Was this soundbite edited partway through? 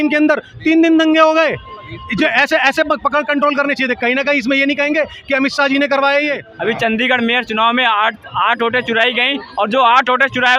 yes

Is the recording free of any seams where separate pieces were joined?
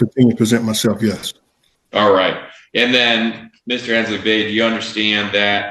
yes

